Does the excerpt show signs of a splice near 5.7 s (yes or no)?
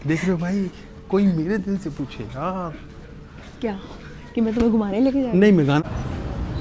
yes